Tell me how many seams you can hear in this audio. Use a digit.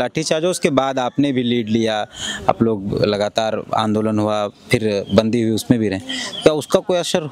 0